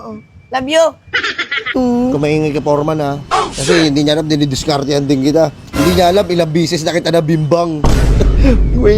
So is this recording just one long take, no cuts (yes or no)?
no